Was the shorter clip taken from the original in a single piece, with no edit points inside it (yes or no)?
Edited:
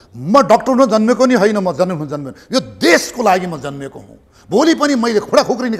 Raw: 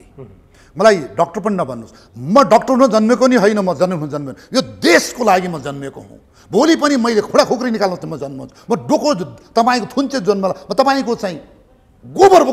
yes